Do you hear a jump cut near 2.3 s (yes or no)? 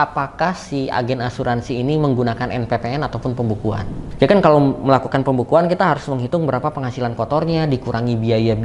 no